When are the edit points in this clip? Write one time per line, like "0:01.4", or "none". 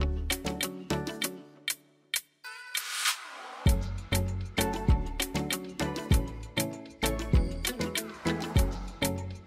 none